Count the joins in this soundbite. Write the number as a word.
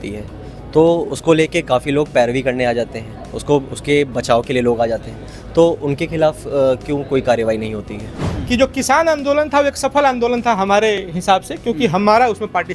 one